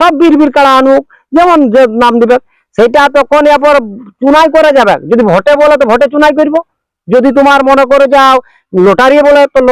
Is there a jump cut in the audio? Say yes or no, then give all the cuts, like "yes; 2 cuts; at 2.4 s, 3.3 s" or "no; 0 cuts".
no; 0 cuts